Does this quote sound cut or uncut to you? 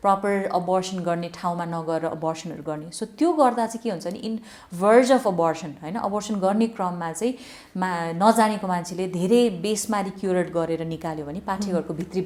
uncut